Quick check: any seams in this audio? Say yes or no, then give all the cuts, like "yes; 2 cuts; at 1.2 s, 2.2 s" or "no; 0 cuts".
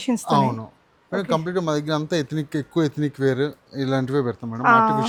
no; 0 cuts